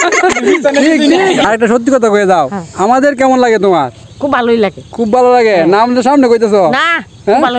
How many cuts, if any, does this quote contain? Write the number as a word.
one